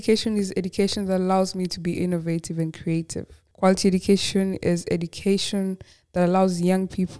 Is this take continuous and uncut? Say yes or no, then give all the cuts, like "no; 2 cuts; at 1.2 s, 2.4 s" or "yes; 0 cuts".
yes; 0 cuts